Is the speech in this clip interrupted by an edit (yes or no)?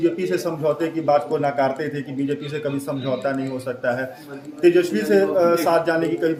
no